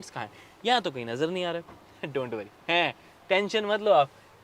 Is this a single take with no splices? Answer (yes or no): yes